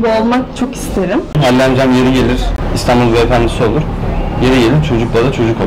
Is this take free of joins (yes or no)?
no